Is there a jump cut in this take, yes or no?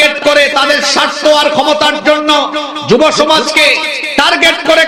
no